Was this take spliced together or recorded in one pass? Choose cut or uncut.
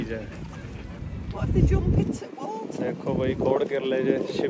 uncut